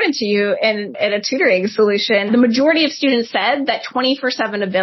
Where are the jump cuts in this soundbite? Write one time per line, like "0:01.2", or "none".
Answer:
0:02.3